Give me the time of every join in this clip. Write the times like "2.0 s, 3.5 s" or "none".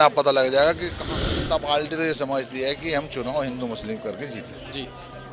1.0 s